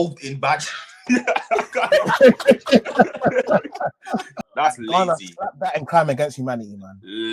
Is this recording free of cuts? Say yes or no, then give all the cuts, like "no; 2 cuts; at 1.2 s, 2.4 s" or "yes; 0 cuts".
no; 1 cut; at 4.4 s